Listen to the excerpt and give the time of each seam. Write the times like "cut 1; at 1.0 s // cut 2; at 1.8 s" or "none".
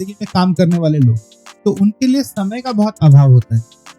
none

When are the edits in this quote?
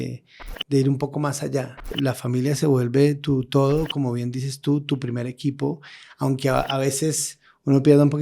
cut 1; at 1.9 s

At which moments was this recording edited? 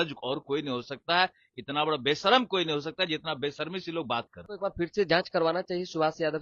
cut 1; at 4.4 s

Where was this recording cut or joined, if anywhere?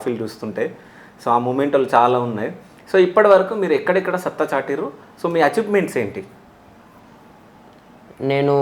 none

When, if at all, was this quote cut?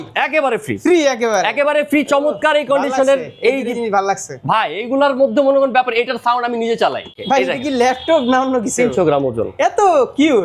cut 1; at 7.2 s

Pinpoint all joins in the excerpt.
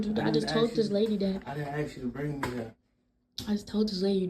cut 1; at 0.9 s

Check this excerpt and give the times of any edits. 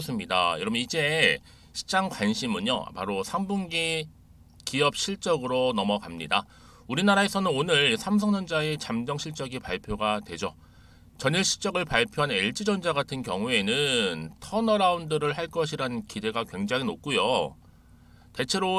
none

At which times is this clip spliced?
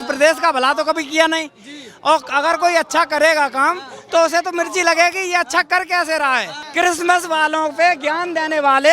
cut 1; at 6.6 s

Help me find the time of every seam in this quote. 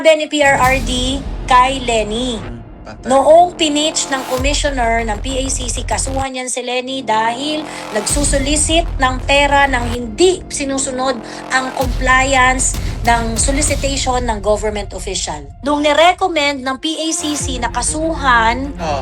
cut 1; at 15.4 s

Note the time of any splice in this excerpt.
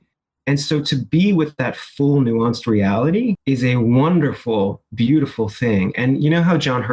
cut 1; at 3.4 s

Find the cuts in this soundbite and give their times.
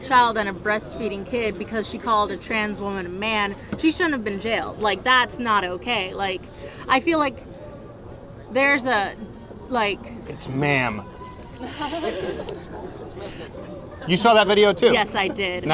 none

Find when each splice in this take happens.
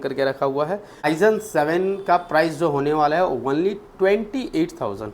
cut 1; at 1.1 s

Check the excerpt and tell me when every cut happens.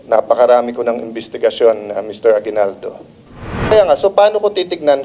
cut 1; at 3.7 s

